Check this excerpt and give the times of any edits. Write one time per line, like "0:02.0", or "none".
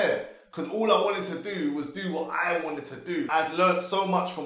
0:03.3